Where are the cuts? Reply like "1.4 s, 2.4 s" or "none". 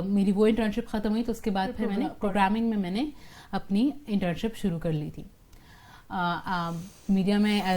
2.1 s